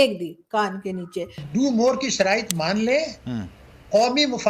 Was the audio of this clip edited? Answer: yes; 1 cut; at 1.4 s

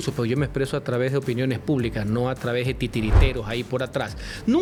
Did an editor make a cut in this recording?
no; 0 cuts

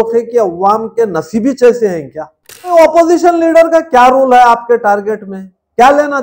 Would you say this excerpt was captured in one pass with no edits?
no; 1 cut; at 2.7 s

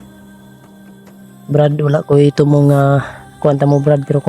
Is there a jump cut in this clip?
yes; 1 cut; at 1.5 s

